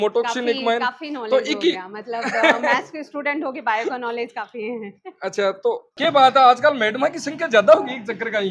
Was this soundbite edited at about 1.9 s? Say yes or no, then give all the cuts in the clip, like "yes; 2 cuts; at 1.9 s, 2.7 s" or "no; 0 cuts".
no; 1 cut; at 5.9 s